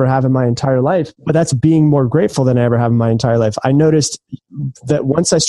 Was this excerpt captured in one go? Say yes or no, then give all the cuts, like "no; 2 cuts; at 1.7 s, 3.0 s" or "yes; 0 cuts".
no; 1 cut; at 1.1 s